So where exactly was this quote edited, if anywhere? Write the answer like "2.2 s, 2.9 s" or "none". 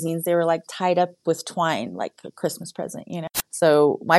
3.0 s